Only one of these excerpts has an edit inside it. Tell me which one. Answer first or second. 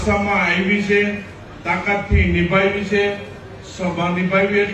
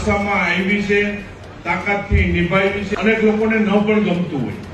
second